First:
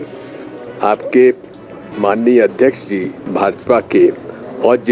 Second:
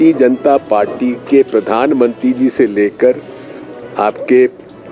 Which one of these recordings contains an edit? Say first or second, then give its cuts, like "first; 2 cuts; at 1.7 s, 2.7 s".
first; 1 cut; at 3.2 s